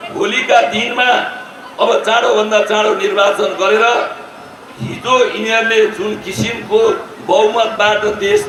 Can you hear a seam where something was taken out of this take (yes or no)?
no